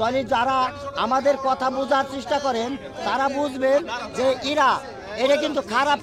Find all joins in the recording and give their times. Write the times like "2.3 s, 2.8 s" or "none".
none